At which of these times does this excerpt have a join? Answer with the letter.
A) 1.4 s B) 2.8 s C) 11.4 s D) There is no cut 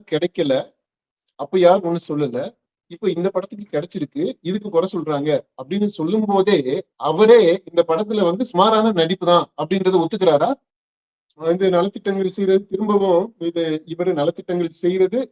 C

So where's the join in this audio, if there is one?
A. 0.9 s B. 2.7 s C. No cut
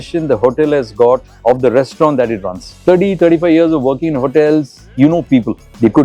B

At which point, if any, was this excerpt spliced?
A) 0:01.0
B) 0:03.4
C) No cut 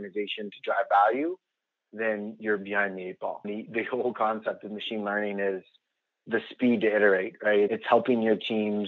B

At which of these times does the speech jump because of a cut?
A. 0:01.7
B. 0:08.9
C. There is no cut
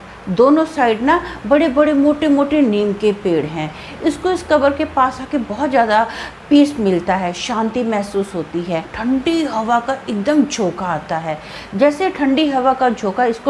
B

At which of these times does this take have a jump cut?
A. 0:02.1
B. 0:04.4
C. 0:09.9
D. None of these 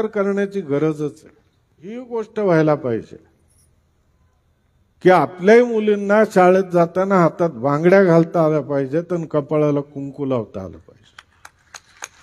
A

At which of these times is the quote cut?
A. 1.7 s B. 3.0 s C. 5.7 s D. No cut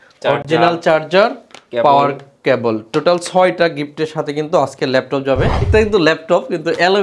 C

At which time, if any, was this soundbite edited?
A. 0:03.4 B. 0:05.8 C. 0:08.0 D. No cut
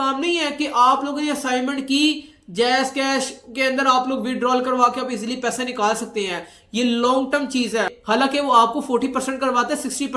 C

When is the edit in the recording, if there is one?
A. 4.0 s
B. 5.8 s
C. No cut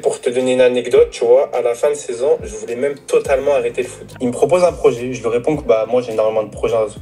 A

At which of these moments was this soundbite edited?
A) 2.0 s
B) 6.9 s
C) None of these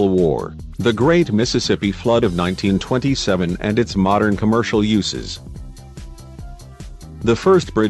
A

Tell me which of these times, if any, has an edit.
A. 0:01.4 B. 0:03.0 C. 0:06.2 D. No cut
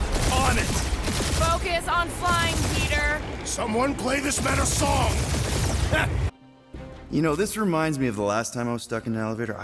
C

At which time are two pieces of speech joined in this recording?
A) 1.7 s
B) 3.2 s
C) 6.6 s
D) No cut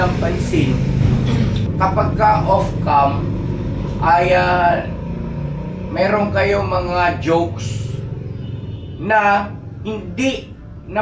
A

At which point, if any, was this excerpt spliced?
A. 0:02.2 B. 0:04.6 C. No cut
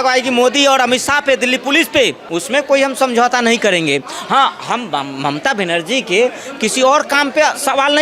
A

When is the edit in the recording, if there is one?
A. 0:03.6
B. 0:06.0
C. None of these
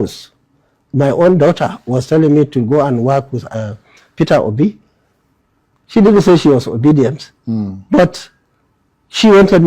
A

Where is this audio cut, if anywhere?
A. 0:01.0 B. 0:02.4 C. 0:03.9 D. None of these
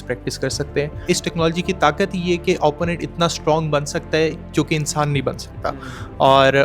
A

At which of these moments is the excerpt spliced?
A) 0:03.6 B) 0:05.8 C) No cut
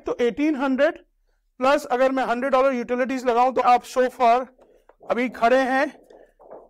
A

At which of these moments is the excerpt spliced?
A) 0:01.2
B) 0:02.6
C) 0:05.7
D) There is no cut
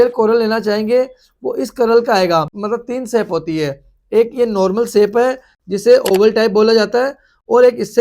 B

